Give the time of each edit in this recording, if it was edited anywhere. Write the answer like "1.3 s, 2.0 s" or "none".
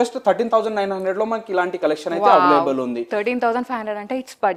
none